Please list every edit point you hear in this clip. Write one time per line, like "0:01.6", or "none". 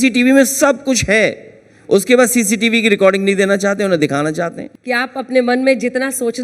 0:04.6